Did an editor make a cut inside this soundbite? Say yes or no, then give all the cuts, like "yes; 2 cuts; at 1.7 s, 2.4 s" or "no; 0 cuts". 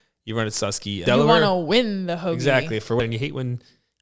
yes; 2 cuts; at 1.0 s, 3.0 s